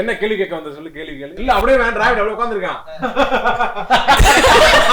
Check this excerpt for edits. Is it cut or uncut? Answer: cut